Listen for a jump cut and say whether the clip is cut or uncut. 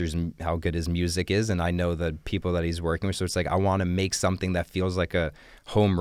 uncut